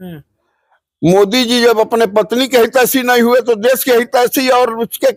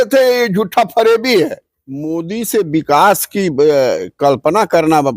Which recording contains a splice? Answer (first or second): second